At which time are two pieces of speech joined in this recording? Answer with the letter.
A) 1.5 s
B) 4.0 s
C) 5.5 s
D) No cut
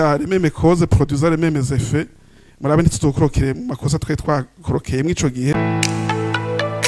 C